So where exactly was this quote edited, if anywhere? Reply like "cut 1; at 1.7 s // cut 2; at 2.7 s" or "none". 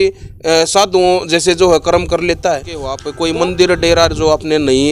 cut 1; at 3.1 s